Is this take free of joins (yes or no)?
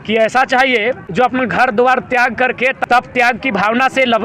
no